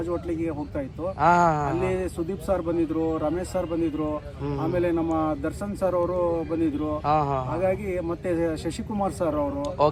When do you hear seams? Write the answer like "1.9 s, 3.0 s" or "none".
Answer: none